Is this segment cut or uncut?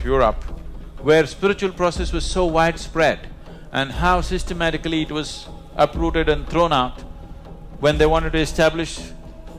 uncut